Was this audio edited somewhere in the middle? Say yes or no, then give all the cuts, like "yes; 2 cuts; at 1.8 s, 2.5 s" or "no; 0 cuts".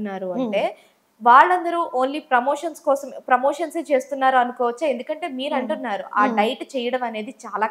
no; 0 cuts